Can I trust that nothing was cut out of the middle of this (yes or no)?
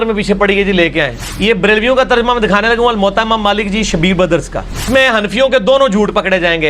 no